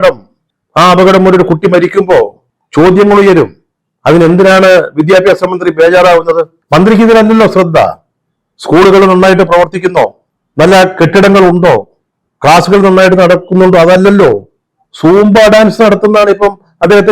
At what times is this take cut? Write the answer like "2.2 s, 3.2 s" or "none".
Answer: 6.5 s

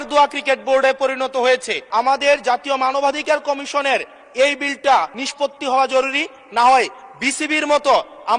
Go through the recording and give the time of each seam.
1.8 s, 5.2 s

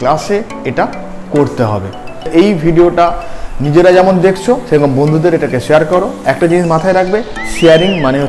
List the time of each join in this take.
2.3 s

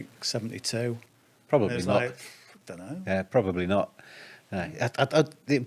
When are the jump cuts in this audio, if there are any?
none

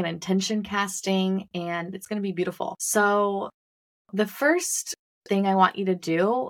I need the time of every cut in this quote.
2.8 s

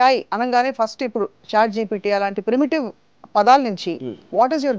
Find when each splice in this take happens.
none

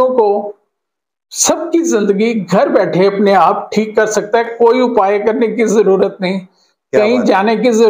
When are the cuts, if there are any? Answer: none

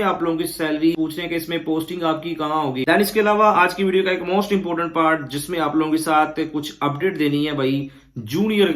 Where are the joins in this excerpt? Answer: 0.9 s, 2.8 s

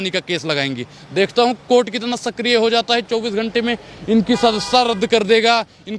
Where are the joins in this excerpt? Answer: none

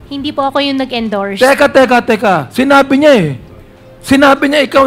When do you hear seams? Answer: none

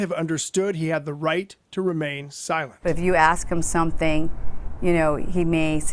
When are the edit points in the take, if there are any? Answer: 2.8 s

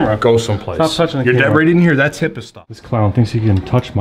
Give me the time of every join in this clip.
3.1 s

